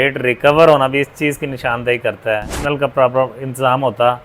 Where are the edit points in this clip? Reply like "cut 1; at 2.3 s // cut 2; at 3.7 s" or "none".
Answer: cut 1; at 2.5 s